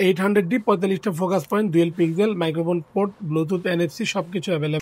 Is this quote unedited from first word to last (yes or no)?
yes